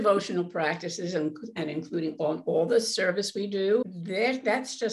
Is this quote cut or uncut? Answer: cut